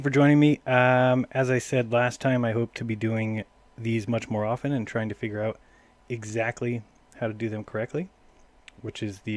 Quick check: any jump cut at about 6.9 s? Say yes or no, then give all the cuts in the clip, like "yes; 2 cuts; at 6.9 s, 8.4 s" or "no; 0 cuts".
yes; 1 cut; at 6.9 s